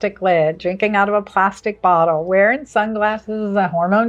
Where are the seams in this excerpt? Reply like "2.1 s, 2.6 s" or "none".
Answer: none